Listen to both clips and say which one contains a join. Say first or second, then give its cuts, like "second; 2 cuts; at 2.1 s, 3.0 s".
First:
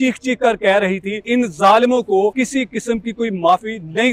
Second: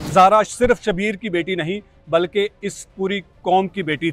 first; 2 cuts; at 1.2 s, 2.3 s